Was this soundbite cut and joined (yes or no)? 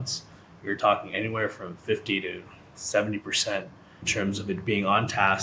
yes